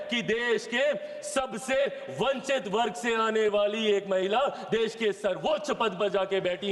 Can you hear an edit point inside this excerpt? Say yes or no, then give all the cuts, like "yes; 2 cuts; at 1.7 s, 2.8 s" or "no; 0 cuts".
no; 0 cuts